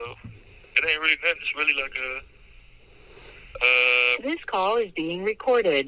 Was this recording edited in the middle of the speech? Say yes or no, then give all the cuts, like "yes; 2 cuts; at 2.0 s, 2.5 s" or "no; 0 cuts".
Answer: no; 0 cuts